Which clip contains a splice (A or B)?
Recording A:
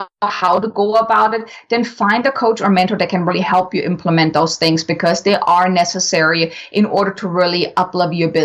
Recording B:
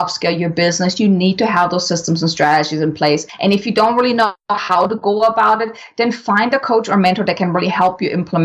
B